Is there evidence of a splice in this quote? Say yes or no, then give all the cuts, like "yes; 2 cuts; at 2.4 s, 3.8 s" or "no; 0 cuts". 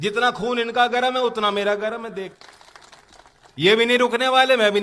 yes; 1 cut; at 2.3 s